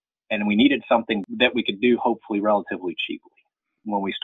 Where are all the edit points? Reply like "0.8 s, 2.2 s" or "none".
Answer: 1.2 s